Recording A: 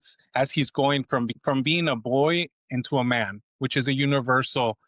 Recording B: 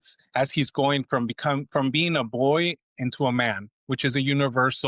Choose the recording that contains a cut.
A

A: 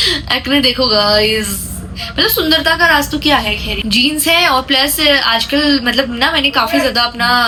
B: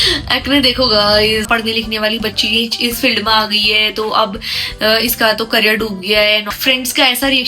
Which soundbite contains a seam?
B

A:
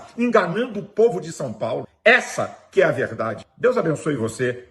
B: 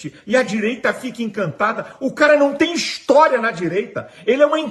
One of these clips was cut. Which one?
A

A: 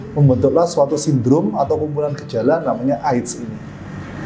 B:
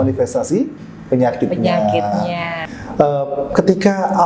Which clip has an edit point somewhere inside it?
B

